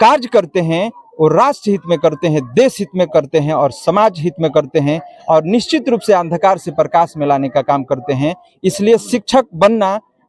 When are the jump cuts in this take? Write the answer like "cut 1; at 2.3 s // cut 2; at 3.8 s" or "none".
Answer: none